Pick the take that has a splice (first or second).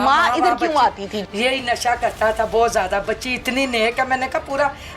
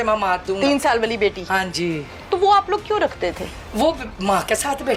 first